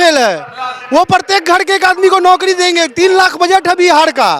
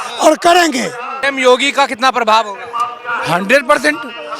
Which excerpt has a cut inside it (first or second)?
second